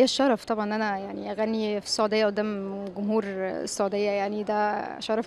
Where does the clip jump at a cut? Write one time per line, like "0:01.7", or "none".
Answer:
none